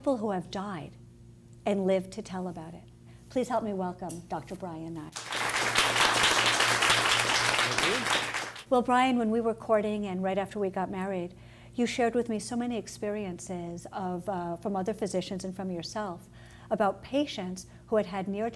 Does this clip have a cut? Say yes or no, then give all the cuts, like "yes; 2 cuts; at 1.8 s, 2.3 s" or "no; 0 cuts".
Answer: no; 0 cuts